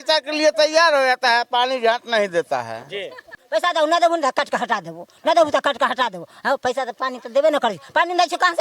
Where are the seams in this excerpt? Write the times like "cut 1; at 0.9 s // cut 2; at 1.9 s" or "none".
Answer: cut 1; at 3.2 s